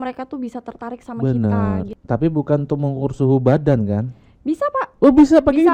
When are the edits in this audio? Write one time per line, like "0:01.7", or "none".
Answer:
0:01.9